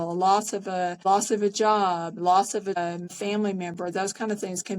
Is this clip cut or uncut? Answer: cut